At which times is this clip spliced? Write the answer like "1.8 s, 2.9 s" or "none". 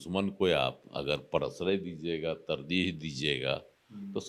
none

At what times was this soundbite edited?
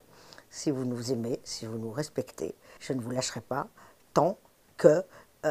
2.7 s

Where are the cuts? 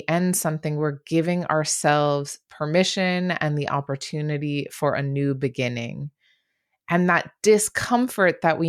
none

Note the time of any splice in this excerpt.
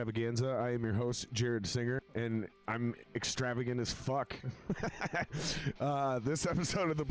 2.1 s

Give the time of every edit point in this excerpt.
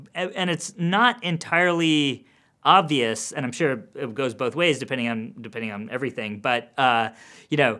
none

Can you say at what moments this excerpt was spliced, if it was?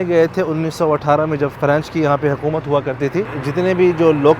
1.5 s, 3.4 s

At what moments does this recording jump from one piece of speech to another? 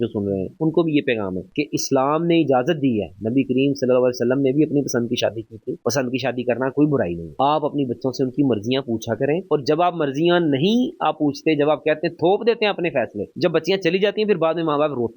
1.4 s

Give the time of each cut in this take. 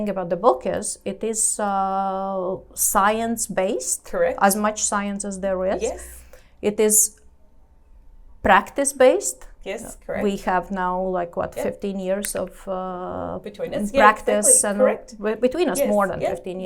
none

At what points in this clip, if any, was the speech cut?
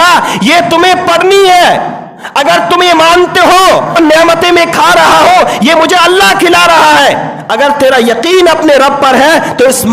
3.9 s

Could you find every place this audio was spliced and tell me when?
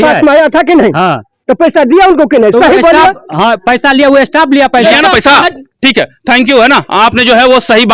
5.6 s

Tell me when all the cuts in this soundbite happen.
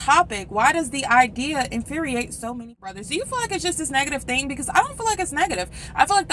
3.0 s

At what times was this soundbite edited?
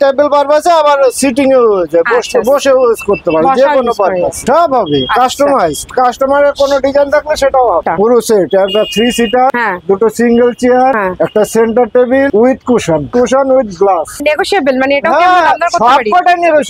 4.4 s, 7.8 s, 14.2 s

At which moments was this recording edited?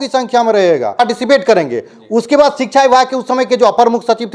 1.0 s

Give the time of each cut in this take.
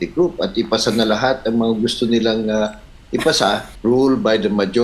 3.7 s

